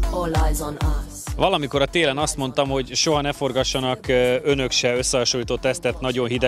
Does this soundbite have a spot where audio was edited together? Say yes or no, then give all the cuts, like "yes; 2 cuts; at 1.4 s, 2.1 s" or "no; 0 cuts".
yes; 1 cut; at 1.0 s